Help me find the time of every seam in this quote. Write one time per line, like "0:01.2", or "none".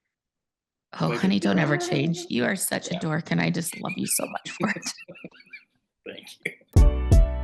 0:06.5